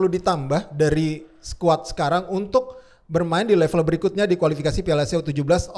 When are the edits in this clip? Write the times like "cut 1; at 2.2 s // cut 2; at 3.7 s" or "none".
none

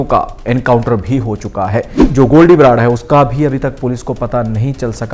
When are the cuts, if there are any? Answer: cut 1; at 2.0 s

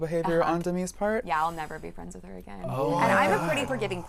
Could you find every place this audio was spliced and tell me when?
none

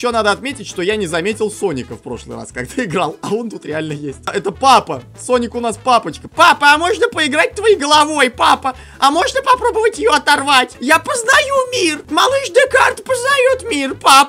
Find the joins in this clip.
cut 1; at 4.2 s // cut 2; at 6.2 s // cut 3; at 10.7 s // cut 4; at 12.0 s

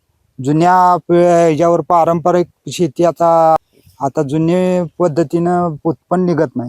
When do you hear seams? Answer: cut 1; at 3.6 s

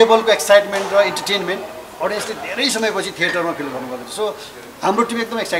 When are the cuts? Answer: none

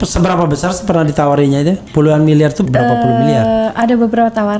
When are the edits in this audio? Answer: cut 1; at 2.7 s

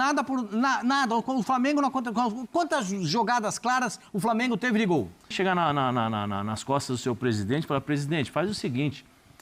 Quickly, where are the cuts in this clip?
cut 1; at 5.3 s

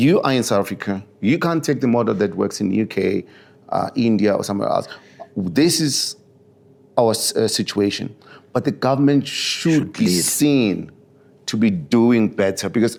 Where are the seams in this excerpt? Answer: none

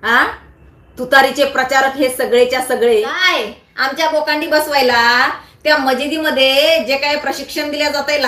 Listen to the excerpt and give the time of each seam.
cut 1; at 3.3 s

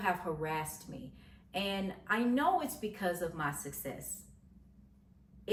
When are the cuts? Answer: none

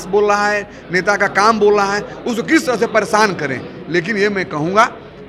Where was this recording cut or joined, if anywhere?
none

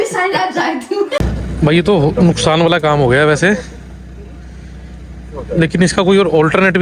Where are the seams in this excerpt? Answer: cut 1; at 1.2 s

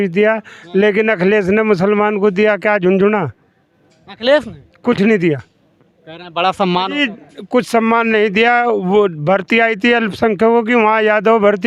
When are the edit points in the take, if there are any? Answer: none

